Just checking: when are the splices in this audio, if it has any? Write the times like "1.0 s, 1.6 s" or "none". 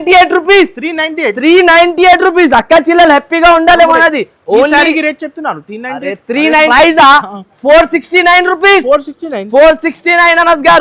6.7 s